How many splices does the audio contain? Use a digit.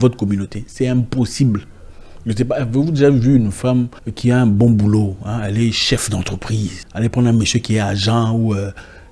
2